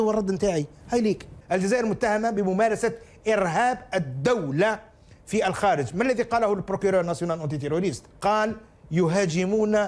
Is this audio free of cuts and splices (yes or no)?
no